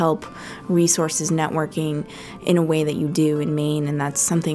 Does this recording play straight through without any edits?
yes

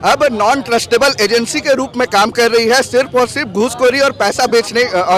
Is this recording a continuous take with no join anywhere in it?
yes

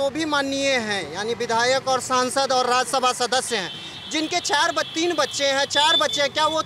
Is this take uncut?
yes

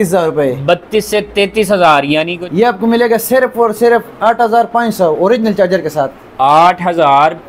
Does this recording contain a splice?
yes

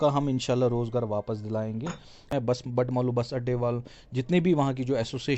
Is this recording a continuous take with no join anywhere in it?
no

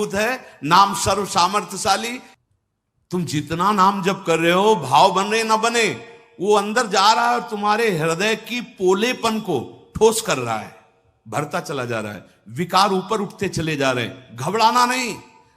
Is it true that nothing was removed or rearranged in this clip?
no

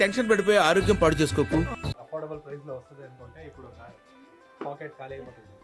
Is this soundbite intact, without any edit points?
no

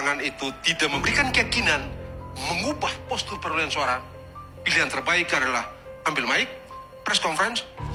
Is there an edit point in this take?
no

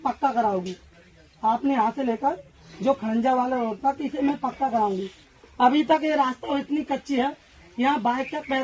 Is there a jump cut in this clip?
no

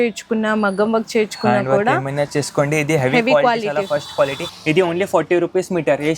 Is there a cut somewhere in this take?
yes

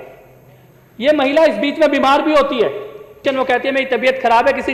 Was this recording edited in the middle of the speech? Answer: yes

